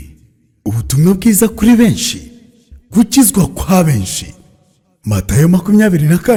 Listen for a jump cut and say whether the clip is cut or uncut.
uncut